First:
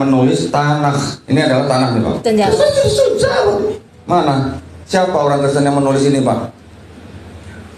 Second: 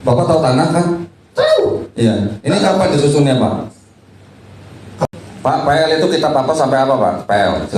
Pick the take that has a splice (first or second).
second